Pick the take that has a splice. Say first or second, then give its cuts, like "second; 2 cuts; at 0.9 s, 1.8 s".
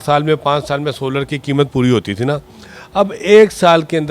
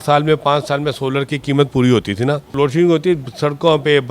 second; 1 cut; at 2.5 s